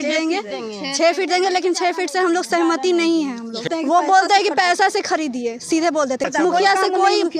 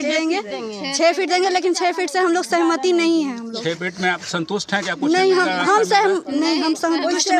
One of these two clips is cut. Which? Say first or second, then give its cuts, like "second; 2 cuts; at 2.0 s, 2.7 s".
first; 2 cuts; at 3.7 s, 6.3 s